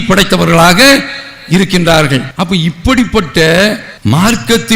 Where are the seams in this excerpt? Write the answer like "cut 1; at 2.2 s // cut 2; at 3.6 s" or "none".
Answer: cut 1; at 2.3 s